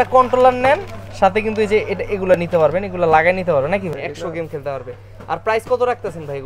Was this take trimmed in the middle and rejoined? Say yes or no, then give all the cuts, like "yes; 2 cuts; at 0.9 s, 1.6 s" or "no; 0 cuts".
yes; 1 cut; at 4.0 s